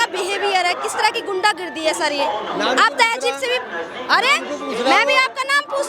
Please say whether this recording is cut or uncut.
uncut